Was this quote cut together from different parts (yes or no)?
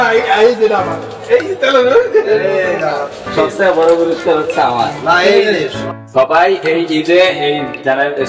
yes